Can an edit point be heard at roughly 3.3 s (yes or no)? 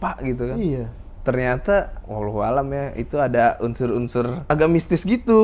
no